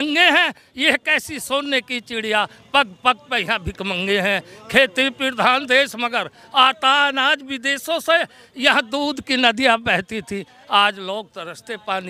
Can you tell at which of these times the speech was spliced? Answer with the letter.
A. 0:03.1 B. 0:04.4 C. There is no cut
C